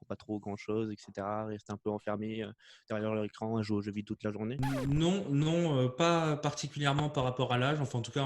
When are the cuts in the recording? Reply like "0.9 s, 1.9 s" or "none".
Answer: 4.6 s